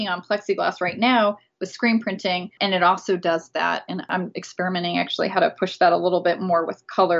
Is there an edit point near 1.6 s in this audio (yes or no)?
no